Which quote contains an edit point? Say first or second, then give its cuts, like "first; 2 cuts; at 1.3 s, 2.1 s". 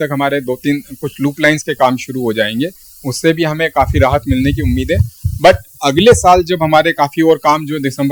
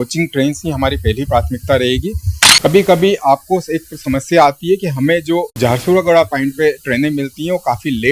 second; 2 cuts; at 2.7 s, 5.5 s